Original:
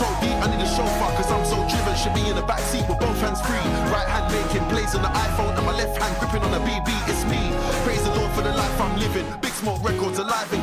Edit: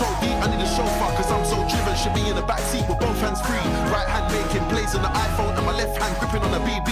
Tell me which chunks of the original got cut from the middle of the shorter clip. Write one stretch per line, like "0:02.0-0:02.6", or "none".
none